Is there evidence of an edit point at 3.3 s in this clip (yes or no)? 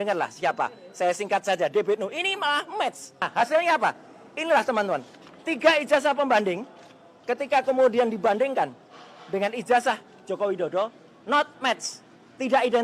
yes